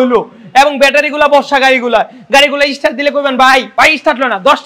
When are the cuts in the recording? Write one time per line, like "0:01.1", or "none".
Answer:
0:03.7